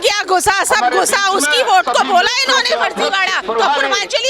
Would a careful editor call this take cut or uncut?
cut